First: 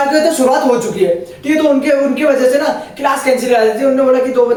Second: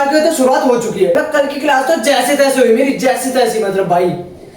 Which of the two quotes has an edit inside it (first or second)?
second